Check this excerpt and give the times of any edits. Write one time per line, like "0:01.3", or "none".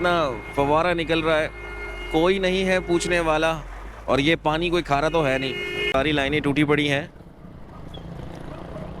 0:05.9